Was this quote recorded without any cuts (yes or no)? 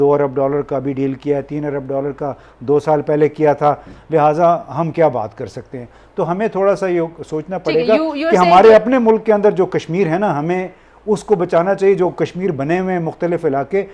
yes